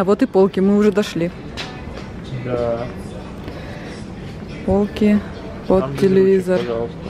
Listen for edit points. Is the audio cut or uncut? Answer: uncut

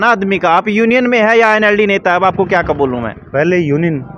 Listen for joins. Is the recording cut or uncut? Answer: uncut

